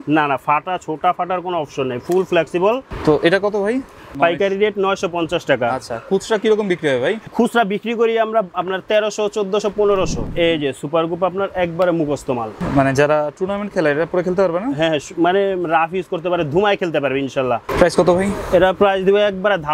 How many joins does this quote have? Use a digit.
6